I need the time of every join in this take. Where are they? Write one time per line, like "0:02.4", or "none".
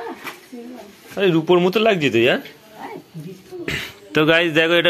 none